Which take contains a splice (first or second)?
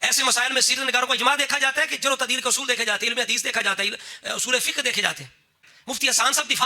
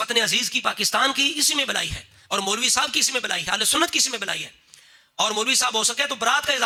first